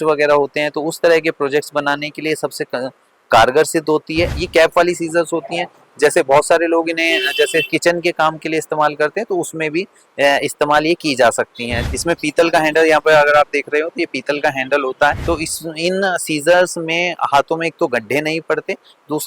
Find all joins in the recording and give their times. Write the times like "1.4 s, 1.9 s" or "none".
4.4 s, 11.7 s, 15.2 s